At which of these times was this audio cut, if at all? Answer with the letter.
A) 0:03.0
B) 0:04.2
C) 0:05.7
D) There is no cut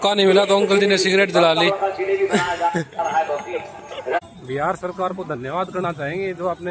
B